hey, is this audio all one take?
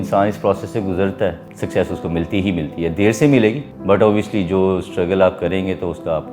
no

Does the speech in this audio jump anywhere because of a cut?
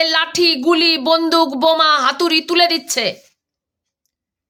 no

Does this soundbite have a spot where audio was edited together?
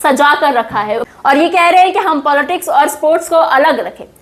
yes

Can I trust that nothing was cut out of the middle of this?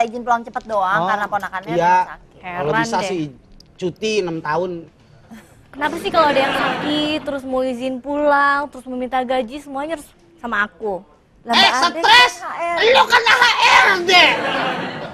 yes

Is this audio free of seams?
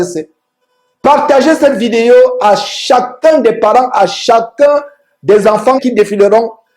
no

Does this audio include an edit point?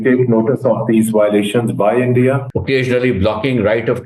yes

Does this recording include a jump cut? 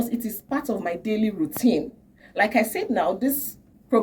no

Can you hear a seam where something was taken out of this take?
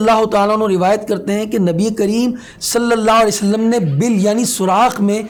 no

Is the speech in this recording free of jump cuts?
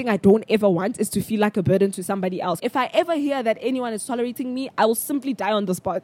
no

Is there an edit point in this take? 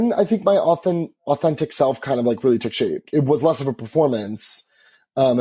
yes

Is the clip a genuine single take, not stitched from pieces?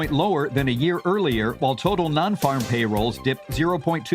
yes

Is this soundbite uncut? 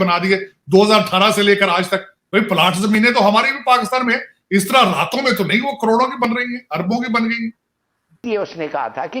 no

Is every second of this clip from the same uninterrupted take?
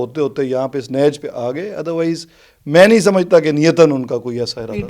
yes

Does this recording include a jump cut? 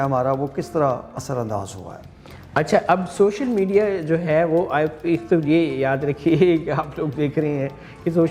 no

